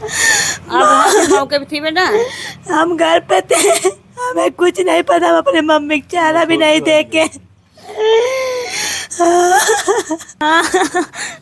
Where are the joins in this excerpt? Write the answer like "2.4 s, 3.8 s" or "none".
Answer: 10.3 s